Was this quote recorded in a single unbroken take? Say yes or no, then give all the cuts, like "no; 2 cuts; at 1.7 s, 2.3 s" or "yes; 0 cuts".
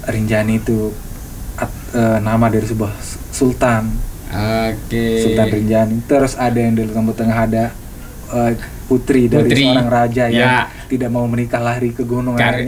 yes; 0 cuts